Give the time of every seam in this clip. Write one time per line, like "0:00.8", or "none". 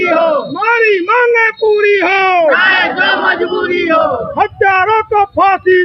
none